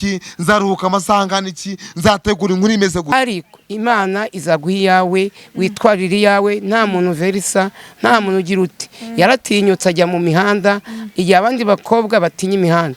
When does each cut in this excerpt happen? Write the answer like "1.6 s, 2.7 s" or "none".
3.1 s